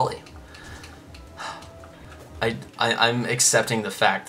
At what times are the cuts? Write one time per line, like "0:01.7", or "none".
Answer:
0:02.1